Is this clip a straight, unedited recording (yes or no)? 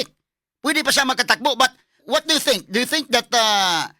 no